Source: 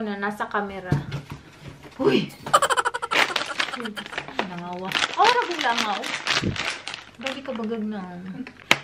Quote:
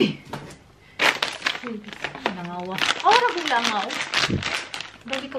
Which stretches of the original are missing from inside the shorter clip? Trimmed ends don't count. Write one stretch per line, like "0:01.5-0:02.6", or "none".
none

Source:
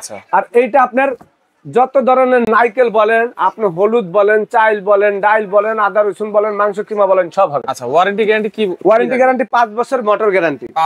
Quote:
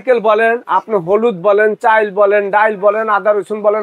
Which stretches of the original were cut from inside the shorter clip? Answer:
none

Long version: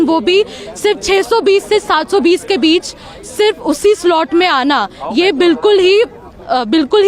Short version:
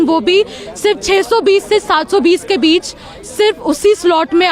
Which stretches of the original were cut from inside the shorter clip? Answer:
none

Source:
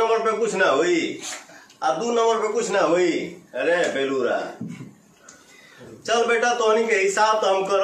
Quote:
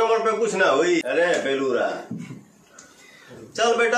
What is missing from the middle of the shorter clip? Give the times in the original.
0:01.0-0:03.5

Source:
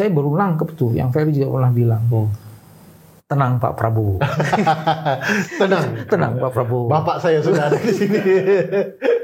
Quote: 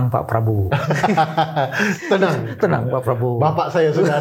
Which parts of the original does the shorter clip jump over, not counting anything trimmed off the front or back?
none

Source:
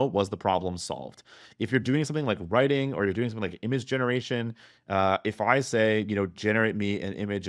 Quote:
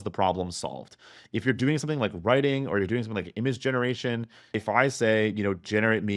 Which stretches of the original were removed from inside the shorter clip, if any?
0:04.8-0:05.3

